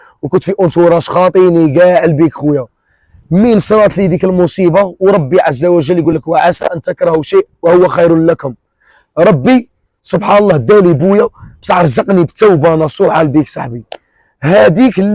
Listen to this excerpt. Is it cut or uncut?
uncut